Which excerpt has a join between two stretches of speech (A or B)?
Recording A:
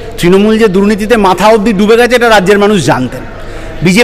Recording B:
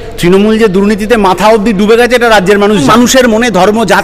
B